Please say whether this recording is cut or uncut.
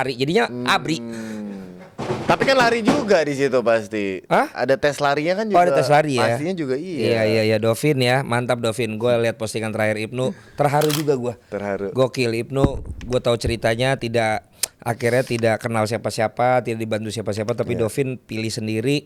uncut